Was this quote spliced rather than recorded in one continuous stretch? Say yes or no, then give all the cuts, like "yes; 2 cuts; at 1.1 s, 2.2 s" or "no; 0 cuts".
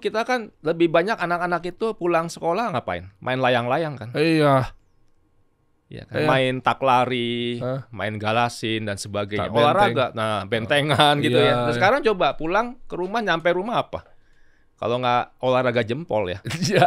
no; 0 cuts